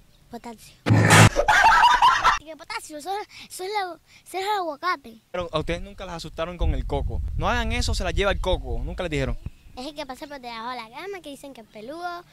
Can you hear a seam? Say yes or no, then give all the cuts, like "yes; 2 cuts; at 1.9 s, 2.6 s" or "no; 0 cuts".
yes; 3 cuts; at 2.5 s, 5.3 s, 7.2 s